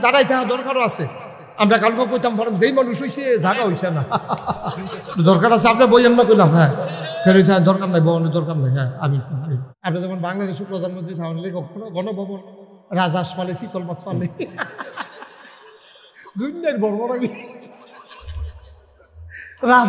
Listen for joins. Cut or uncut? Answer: cut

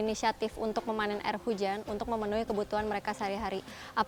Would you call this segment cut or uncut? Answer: uncut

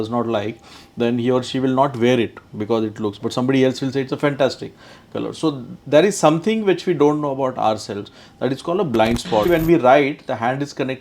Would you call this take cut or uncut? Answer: cut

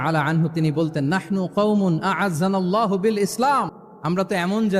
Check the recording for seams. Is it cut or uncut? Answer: cut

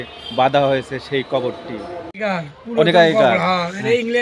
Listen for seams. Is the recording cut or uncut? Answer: cut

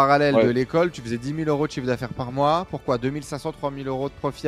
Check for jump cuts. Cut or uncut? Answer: uncut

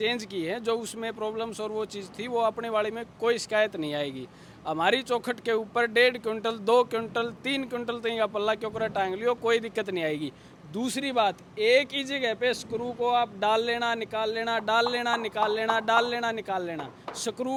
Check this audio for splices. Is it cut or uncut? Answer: uncut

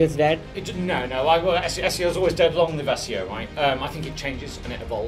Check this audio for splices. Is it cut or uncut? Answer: uncut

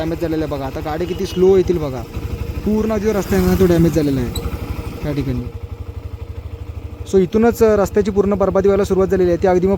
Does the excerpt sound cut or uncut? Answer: uncut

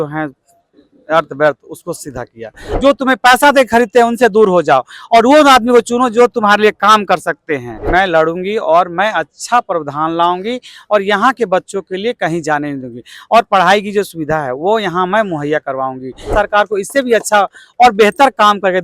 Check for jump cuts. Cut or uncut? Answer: cut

